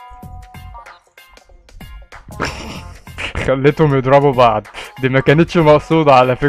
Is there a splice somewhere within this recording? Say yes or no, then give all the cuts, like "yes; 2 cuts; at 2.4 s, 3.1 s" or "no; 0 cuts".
no; 0 cuts